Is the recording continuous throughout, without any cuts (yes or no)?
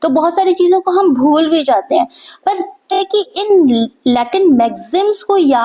no